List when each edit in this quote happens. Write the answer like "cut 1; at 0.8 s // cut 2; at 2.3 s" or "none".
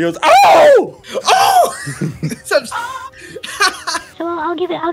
cut 1; at 1.0 s // cut 2; at 4.1 s